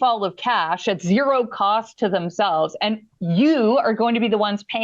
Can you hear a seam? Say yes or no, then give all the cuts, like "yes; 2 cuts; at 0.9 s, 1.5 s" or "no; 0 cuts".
no; 0 cuts